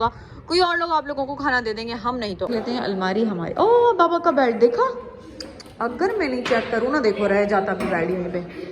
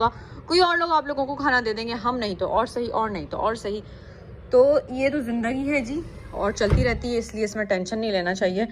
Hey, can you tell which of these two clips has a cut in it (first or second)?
first